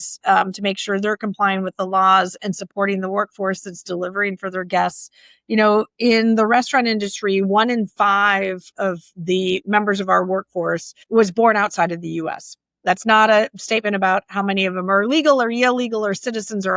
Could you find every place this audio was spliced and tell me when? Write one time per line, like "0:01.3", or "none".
0:09.6
0:10.9